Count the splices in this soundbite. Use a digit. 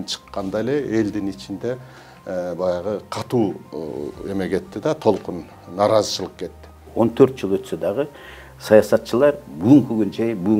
1